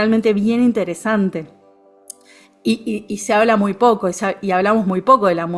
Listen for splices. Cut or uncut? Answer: uncut